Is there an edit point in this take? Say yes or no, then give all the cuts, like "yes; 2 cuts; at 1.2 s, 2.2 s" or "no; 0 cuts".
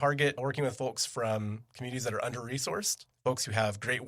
yes; 1 cut; at 3.0 s